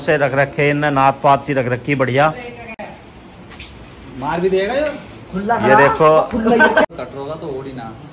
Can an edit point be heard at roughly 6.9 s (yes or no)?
yes